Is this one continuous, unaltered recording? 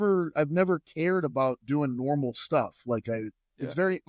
yes; 0 cuts

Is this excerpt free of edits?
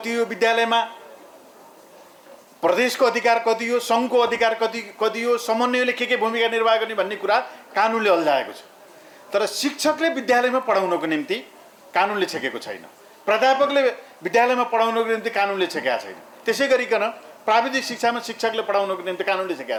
yes; 0 cuts

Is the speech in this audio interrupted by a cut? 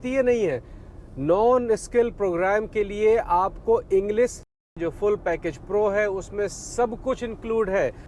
yes; 1 cut; at 4.4 s

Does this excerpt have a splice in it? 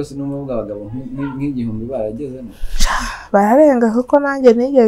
no; 0 cuts

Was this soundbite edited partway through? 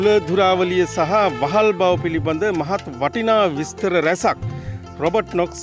no; 0 cuts

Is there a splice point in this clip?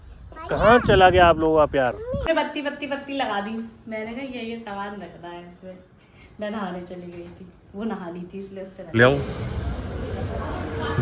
yes; 2 cuts; at 2.2 s, 9.0 s

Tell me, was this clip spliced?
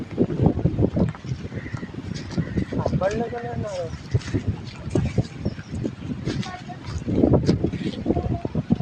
no; 0 cuts

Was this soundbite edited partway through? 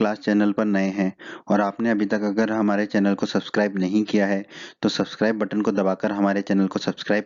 yes; 1 cut; at 3.5 s

